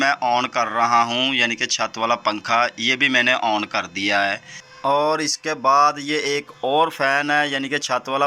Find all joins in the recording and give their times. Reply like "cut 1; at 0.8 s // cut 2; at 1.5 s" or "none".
none